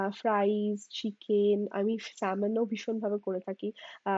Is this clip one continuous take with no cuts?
yes; 0 cuts

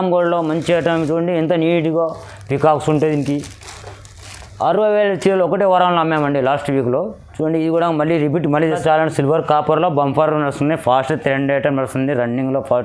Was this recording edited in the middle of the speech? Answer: yes; 1 cut; at 8.8 s

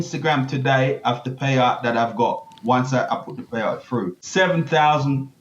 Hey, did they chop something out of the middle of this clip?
yes; 1 cut; at 4.2 s

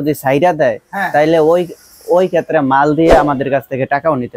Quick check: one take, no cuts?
yes; 0 cuts

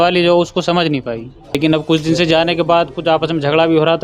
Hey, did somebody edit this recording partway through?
yes; 1 cut; at 1.6 s

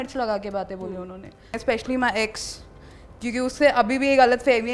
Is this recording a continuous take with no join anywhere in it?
no; 1 cut; at 1.6 s

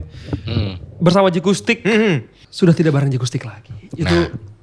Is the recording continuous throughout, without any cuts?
no; 1 cut; at 2.4 s

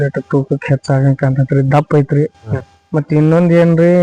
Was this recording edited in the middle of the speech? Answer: no; 0 cuts

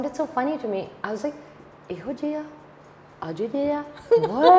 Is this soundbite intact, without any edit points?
yes; 0 cuts

